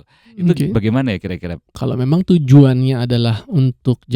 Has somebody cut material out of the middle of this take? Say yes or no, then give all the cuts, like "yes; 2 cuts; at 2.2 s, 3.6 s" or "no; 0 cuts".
yes; 1 cut; at 1.8 s